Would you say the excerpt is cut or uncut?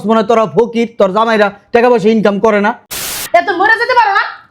cut